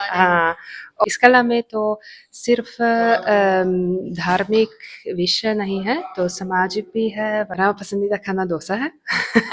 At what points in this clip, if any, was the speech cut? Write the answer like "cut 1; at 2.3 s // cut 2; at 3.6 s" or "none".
cut 1; at 1.0 s // cut 2; at 7.5 s